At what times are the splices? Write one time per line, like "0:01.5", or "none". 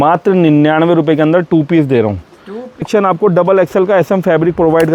0:02.9

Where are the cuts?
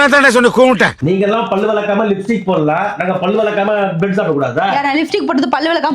0:00.9

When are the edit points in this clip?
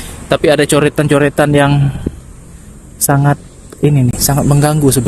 none

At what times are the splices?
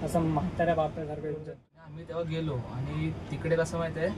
0:01.4

